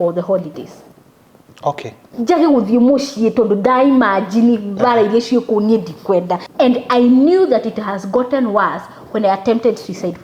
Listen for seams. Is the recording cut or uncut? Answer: cut